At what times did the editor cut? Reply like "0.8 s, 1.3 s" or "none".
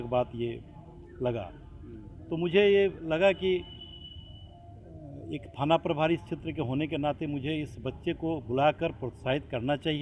none